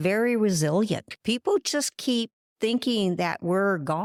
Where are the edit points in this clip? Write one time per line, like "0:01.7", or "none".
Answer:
none